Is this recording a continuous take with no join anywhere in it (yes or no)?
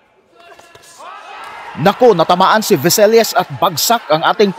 yes